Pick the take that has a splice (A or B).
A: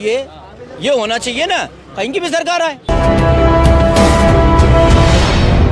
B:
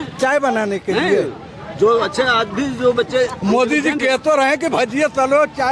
A